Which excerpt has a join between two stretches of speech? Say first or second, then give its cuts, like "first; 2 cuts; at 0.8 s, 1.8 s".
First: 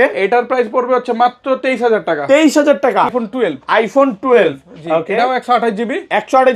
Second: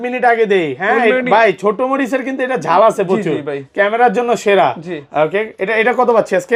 first; 1 cut; at 3.1 s